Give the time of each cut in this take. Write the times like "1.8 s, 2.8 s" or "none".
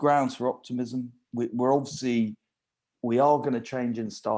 none